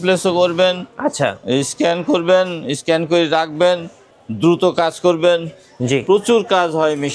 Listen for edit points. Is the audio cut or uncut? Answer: uncut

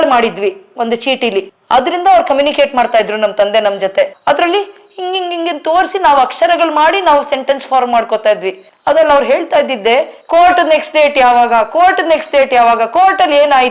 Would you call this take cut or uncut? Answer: uncut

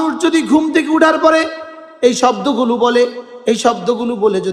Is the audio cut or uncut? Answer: uncut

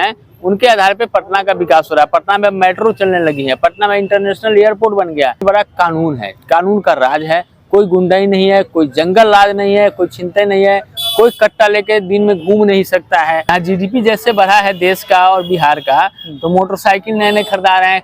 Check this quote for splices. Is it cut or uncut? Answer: cut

